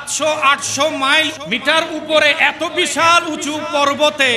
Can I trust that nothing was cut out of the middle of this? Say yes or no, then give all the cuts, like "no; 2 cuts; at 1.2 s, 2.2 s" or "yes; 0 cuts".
no; 1 cut; at 1.4 s